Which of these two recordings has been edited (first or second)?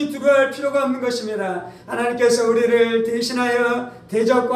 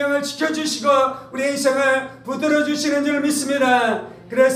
first